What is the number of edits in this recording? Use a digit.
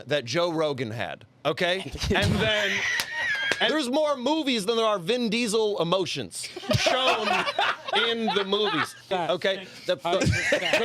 2